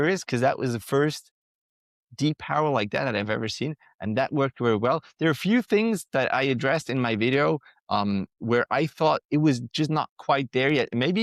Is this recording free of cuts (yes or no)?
yes